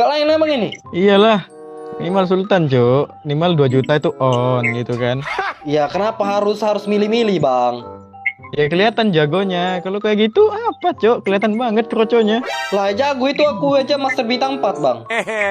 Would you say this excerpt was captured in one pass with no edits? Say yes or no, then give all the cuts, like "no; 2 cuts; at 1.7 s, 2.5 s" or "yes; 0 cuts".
yes; 0 cuts